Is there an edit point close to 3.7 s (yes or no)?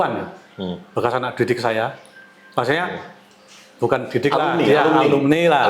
no